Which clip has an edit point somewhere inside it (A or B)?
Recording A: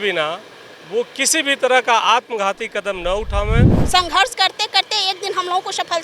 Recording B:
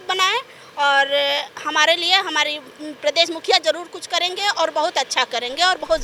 A